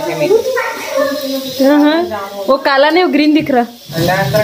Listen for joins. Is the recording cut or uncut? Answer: uncut